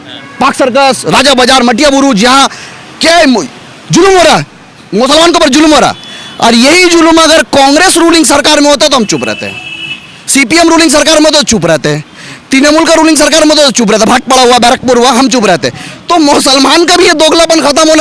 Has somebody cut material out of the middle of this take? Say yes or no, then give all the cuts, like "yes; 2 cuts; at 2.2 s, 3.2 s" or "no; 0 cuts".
no; 0 cuts